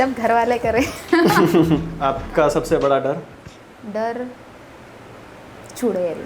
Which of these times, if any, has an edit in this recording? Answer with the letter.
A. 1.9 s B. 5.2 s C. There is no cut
A